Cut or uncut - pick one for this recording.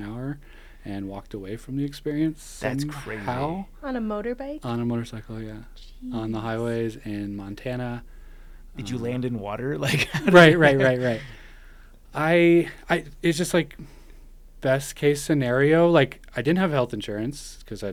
uncut